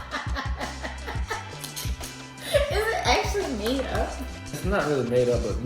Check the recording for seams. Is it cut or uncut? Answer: cut